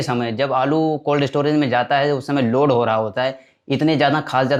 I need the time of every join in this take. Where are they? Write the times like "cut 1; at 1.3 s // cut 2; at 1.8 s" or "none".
none